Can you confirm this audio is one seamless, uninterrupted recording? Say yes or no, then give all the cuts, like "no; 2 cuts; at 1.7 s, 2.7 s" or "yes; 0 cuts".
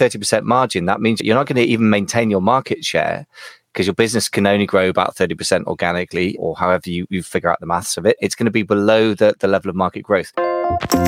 no; 2 cuts; at 1.2 s, 10.3 s